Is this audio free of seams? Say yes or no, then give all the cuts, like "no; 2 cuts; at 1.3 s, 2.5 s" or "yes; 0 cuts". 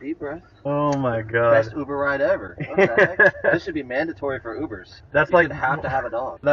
yes; 0 cuts